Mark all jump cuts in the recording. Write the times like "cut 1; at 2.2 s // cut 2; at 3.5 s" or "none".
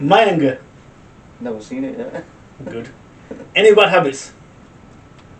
none